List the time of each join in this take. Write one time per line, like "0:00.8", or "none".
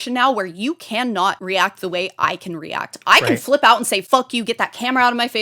0:01.4
0:04.0